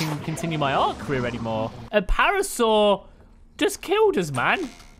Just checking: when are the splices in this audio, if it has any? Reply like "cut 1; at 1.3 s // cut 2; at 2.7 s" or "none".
cut 1; at 1.8 s